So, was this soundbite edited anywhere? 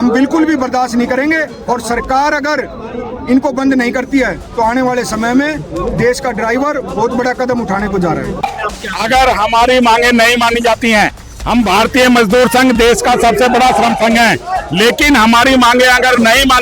yes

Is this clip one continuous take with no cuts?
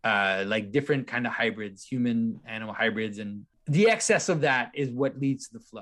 no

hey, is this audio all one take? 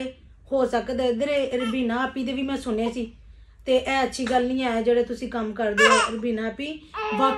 yes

